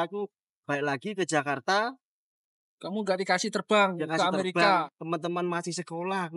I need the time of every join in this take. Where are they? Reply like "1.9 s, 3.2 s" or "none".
4.9 s